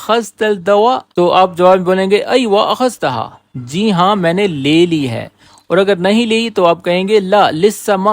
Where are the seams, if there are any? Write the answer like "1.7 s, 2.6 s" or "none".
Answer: 1.1 s